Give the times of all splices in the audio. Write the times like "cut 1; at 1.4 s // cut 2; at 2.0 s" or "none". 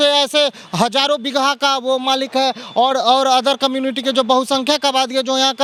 none